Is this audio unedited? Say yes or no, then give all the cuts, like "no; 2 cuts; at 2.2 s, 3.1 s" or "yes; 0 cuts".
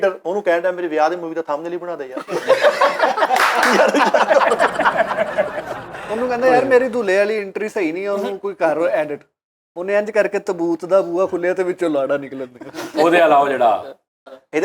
yes; 0 cuts